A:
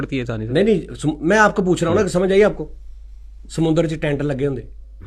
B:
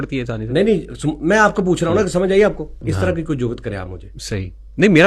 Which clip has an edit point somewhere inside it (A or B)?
B